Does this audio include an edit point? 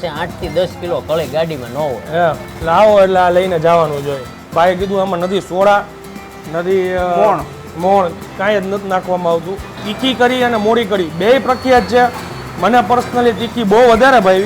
yes; 1 cut; at 4.3 s

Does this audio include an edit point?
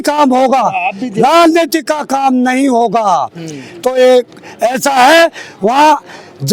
no; 0 cuts

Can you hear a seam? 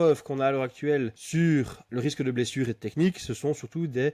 yes; 2 cuts; at 1.2 s, 1.8 s

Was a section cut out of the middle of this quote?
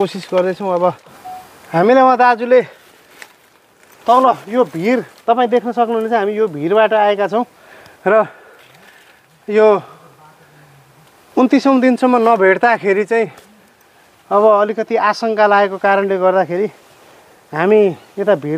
yes; 1 cut; at 1.3 s

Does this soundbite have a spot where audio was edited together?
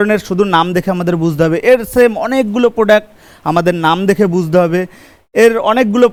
no; 0 cuts

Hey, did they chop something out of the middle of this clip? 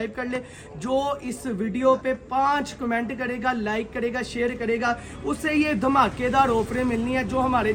no; 0 cuts

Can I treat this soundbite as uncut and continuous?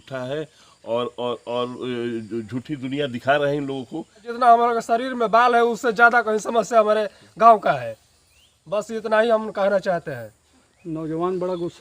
no; 1 cut; at 4.3 s

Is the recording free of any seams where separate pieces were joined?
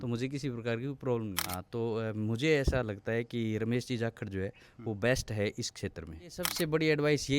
no; 2 cuts; at 1.4 s, 6.4 s

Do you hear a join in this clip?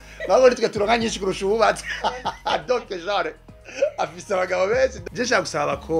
yes; 1 cut; at 5.0 s

